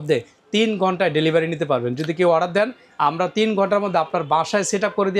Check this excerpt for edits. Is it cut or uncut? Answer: uncut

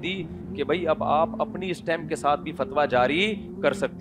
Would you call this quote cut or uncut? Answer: uncut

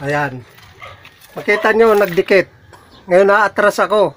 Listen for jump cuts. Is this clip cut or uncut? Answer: uncut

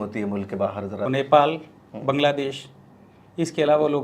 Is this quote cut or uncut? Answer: cut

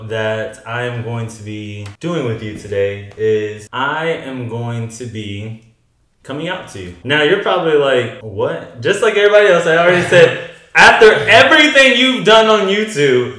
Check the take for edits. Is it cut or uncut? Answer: uncut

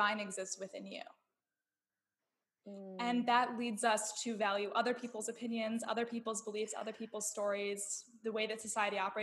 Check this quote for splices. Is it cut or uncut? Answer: uncut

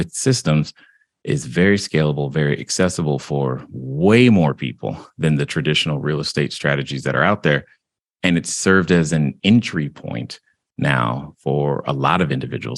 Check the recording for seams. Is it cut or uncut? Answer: uncut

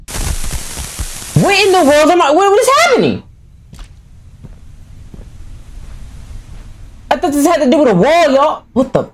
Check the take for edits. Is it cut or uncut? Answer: uncut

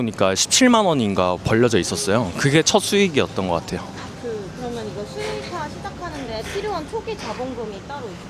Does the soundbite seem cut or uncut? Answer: uncut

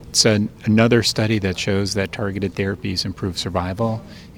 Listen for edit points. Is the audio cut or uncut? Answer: uncut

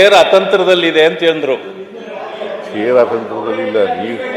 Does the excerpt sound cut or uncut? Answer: uncut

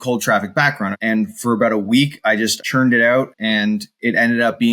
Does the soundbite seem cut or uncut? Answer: cut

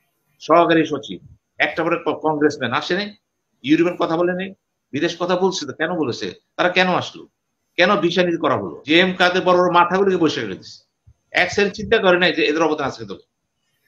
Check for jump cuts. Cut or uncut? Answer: cut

